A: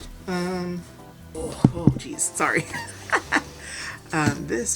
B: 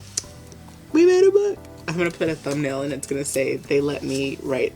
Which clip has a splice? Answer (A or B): A